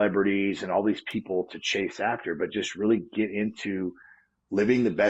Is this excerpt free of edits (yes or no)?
yes